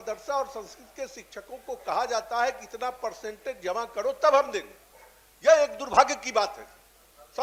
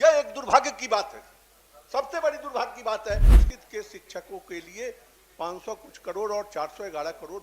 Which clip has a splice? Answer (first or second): second